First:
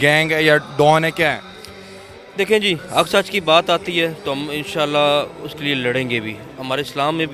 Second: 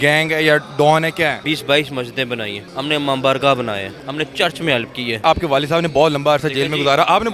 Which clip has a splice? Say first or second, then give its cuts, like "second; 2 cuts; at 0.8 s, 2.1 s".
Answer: second; 4 cuts; at 1.4 s, 2.6 s, 4.0 s, 5.2 s